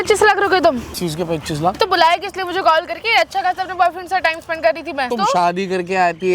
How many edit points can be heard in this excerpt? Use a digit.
2